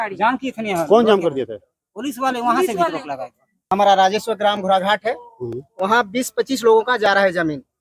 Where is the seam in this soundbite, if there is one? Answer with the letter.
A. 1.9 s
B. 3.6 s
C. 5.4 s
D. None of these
B